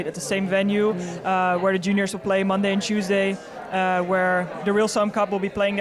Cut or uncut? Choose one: uncut